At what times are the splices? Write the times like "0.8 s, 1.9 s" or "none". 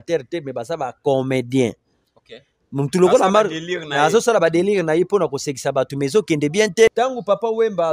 6.9 s